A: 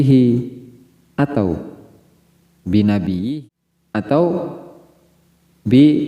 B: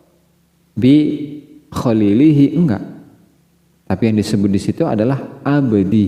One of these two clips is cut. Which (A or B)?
A